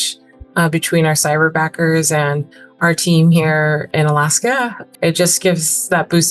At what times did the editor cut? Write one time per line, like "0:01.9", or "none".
0:03.9
0:04.8

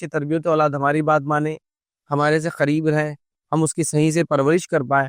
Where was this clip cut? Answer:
none

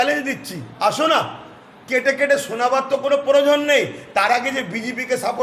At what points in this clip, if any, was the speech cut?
none

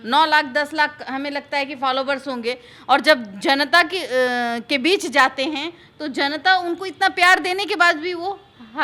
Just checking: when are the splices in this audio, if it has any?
none

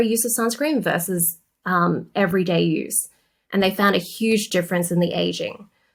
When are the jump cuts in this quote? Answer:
none

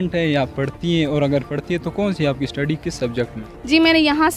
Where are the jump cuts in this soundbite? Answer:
0:03.5

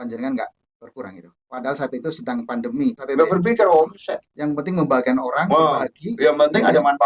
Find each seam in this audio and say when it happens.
none

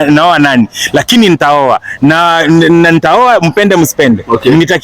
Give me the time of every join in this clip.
none

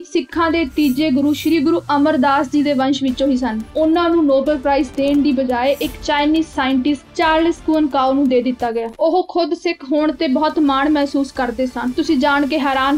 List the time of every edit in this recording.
0:03.7
0:08.9
0:11.9

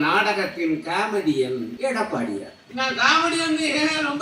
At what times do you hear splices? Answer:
0:01.7
0:02.6

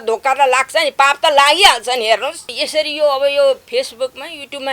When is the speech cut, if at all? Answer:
0:02.6

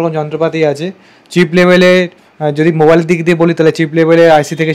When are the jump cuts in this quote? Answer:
none

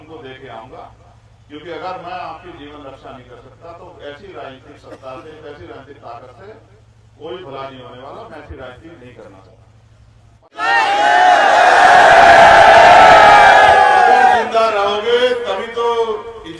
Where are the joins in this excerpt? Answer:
0:10.4

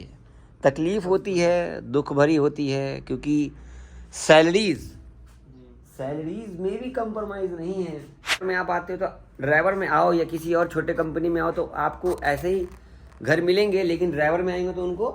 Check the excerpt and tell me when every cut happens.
0:08.4

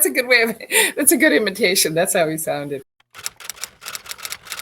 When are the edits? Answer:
0:03.0

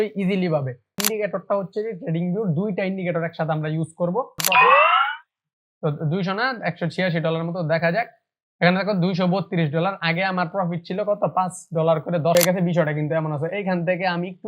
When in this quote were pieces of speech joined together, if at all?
0:01.0
0:04.4
0:12.4

